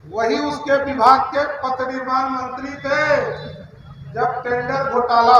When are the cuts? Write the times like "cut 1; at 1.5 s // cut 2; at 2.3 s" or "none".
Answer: none